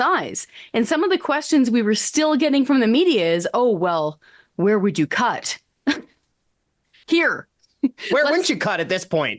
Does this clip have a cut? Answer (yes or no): no